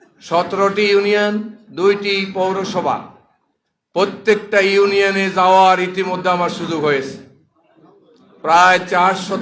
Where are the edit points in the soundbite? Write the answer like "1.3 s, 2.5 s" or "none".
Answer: none